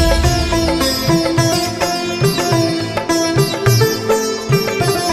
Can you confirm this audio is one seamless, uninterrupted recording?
yes; 0 cuts

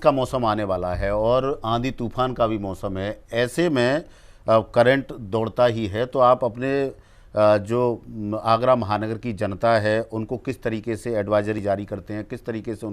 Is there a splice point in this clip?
no; 0 cuts

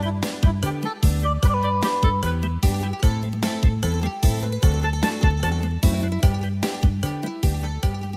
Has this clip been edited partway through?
no; 0 cuts

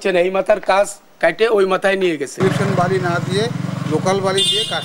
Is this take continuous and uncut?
no; 1 cut; at 2.4 s

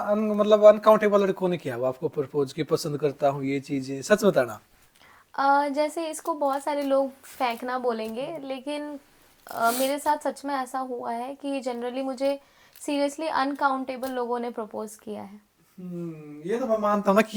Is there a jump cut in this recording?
no; 0 cuts

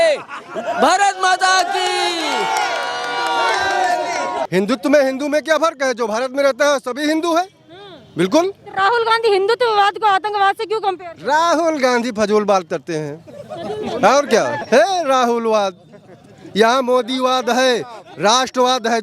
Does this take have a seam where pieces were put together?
yes; 2 cuts; at 4.4 s, 14.6 s

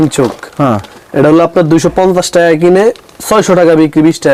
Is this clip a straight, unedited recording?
yes; 0 cuts

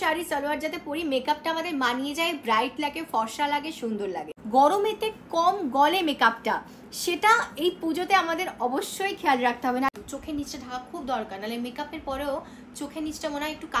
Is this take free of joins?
no; 2 cuts; at 4.3 s, 9.9 s

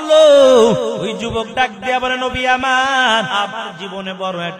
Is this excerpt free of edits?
no; 2 cuts; at 1.1 s, 3.3 s

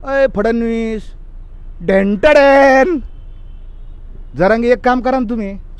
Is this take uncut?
yes; 0 cuts

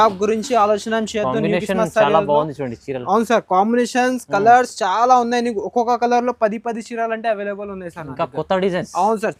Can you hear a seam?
no; 0 cuts

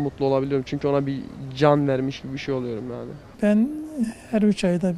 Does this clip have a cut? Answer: yes; 1 cut; at 3.3 s

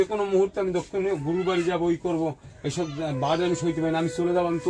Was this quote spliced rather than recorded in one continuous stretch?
no; 0 cuts

